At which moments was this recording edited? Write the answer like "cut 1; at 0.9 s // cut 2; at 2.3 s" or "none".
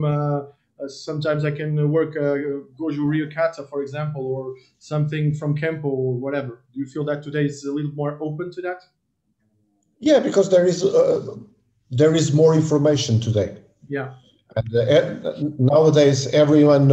none